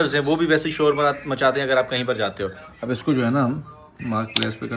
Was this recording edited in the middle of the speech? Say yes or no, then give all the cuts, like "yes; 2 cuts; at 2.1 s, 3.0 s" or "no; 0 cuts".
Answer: no; 0 cuts